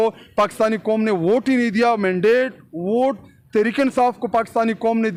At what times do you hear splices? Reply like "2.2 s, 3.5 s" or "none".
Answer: none